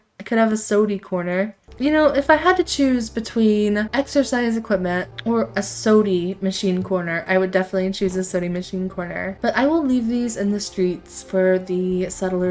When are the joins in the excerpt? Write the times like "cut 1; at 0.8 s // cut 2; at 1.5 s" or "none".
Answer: cut 1; at 1.6 s // cut 2; at 3.9 s // cut 3; at 5.1 s // cut 4; at 9.3 s